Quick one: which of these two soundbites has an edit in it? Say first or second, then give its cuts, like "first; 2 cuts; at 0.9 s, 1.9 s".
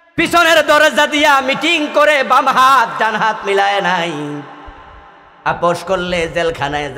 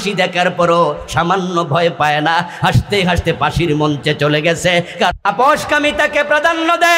second; 1 cut; at 5.1 s